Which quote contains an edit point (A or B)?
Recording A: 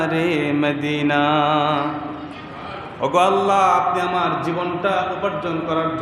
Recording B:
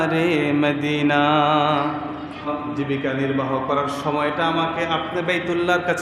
B